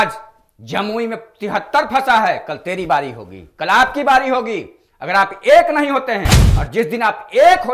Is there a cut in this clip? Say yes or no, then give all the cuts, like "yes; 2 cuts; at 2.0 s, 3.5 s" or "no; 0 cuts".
no; 0 cuts